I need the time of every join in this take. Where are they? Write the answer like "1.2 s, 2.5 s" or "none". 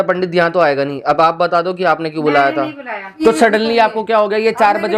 3.2 s